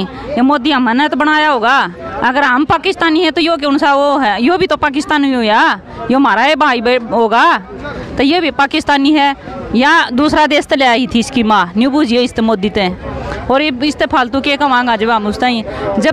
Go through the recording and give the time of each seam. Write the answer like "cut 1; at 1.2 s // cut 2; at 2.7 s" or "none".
none